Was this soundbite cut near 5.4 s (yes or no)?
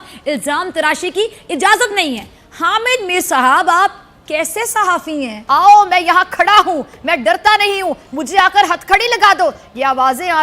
yes